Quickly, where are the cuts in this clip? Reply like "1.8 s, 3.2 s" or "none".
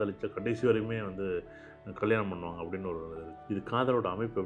3.3 s